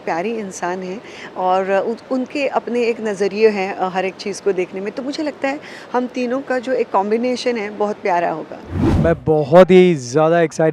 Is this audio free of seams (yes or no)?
yes